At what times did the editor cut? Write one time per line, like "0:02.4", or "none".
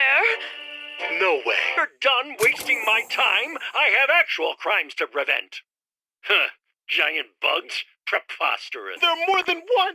0:01.7
0:09.0